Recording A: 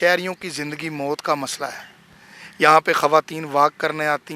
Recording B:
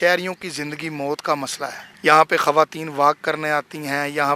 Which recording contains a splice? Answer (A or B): B